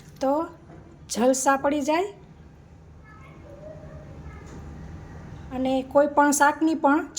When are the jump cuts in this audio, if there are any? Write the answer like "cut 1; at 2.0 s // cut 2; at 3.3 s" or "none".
cut 1; at 5.5 s